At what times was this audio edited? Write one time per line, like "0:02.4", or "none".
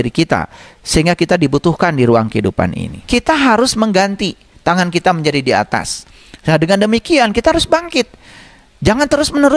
0:02.9